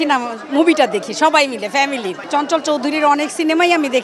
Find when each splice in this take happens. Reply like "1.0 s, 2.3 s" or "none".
2.2 s